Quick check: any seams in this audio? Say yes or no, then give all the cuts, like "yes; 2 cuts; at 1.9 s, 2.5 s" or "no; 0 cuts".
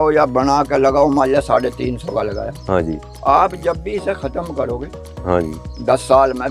no; 0 cuts